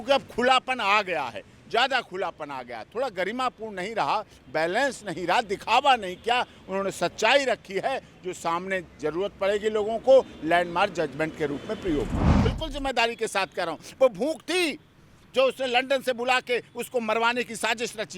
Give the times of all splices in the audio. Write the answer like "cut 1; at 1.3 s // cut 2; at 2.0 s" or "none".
cut 1; at 12.4 s